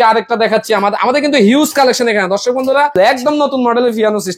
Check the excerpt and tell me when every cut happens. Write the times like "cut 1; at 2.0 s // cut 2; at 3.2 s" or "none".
cut 1; at 2.9 s